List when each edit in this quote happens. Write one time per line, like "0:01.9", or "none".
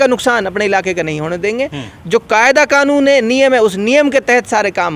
none